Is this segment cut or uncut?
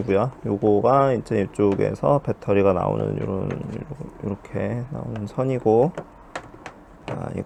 uncut